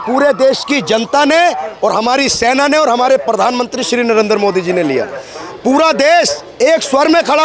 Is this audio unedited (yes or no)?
yes